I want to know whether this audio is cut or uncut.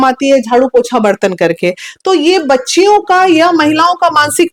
uncut